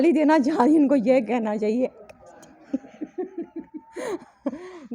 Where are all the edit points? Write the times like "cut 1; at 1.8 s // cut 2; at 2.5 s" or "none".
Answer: none